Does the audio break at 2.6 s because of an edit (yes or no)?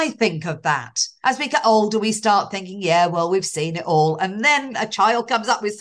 no